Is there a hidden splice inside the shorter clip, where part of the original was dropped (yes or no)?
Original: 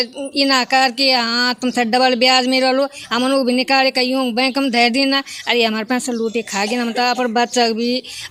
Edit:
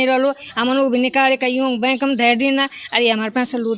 no